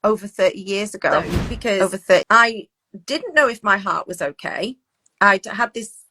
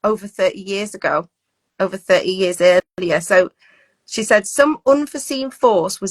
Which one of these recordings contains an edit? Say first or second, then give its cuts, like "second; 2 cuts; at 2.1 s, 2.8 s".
first; 1 cut; at 2.2 s